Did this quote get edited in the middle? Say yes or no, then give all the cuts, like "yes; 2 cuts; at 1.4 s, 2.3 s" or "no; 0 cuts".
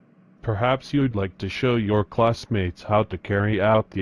no; 0 cuts